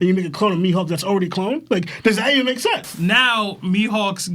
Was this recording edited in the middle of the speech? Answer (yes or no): yes